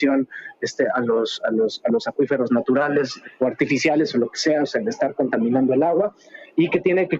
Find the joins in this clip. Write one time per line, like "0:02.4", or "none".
0:03.2